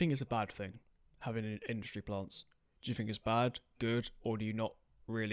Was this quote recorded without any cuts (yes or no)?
yes